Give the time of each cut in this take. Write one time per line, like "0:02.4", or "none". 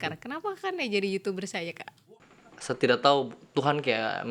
0:01.9